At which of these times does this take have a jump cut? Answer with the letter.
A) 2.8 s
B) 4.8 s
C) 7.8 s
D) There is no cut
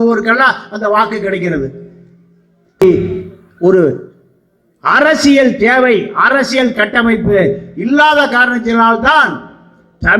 A